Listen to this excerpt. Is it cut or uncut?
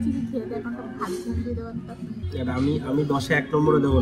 cut